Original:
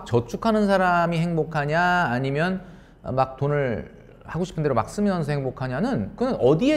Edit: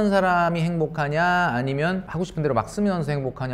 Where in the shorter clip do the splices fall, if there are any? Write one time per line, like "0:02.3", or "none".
0:02.1